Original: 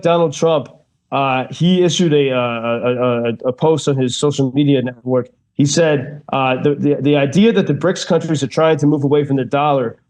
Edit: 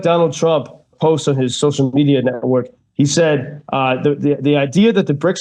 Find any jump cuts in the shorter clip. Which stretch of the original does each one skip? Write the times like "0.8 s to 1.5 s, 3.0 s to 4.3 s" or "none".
1.0 s to 3.6 s